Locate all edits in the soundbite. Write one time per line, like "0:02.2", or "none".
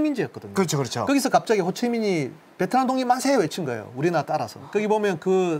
none